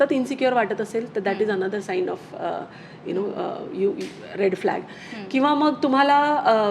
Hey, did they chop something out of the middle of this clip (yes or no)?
no